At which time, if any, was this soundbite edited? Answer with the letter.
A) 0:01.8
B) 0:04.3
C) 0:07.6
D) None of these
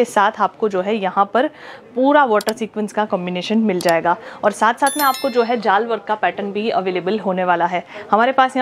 D